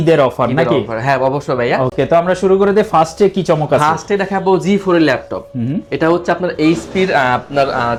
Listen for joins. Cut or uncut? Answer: uncut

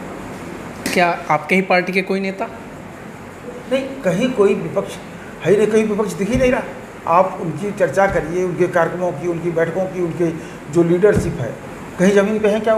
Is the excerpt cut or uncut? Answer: uncut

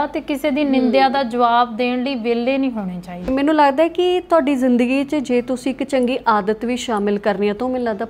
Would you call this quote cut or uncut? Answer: cut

